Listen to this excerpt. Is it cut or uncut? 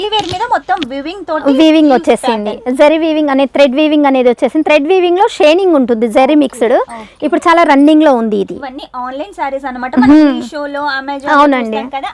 uncut